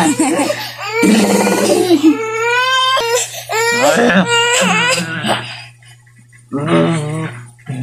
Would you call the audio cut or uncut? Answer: cut